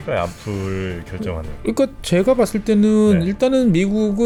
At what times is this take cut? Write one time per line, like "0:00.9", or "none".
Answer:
none

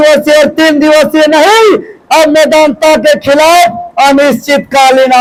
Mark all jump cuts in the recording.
none

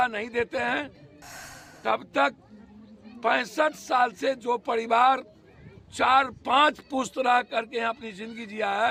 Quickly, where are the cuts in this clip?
none

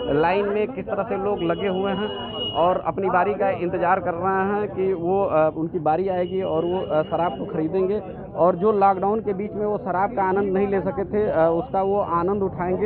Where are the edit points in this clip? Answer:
none

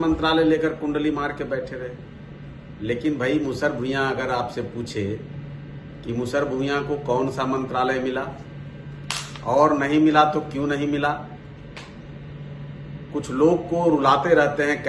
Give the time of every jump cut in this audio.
none

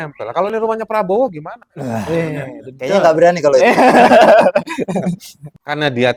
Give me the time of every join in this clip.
none

